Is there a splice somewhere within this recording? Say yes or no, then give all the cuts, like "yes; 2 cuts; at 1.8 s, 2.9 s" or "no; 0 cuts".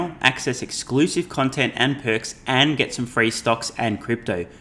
no; 0 cuts